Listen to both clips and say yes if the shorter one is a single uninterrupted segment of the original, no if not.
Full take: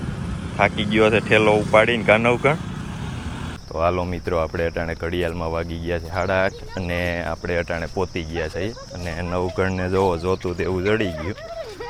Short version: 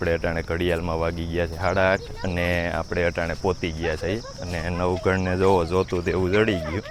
yes